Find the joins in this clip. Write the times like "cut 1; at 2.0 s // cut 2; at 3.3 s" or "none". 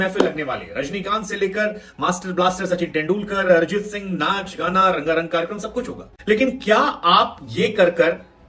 cut 1; at 6.1 s